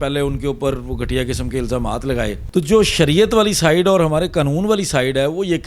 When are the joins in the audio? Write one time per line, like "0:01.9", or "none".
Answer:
0:02.4